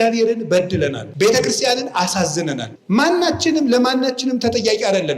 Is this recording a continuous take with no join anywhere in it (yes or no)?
no